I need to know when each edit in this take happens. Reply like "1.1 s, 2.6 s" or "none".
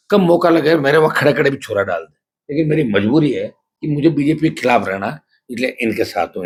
none